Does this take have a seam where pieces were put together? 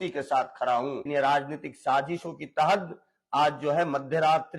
yes; 1 cut; at 1.0 s

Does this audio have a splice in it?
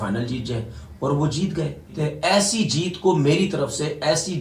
yes; 1 cut; at 1.9 s

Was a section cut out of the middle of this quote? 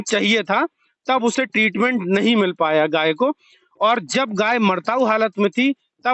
no; 0 cuts

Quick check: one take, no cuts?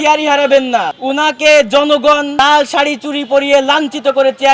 no; 2 cuts; at 0.9 s, 2.3 s

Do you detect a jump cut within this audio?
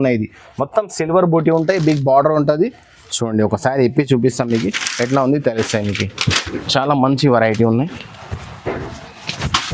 no; 0 cuts

